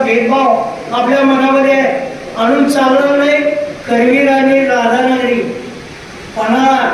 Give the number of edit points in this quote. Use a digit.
1